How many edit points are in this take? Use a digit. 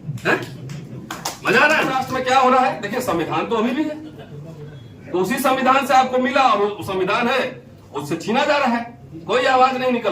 1